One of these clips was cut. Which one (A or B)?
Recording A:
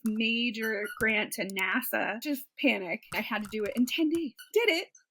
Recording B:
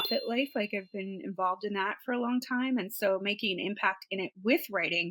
A